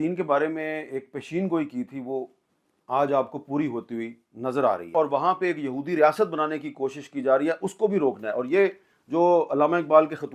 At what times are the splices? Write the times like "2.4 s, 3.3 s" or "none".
4.9 s